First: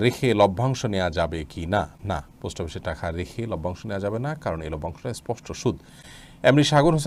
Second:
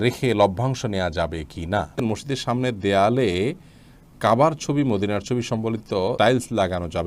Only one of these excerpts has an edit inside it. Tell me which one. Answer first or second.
second